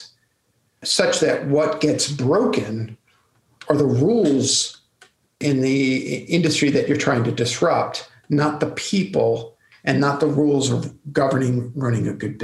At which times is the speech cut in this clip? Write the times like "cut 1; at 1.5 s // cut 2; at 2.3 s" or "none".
cut 1; at 0.8 s // cut 2; at 5.4 s